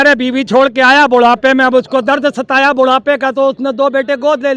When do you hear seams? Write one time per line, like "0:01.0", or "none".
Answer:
none